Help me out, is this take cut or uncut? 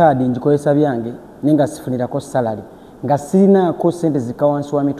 uncut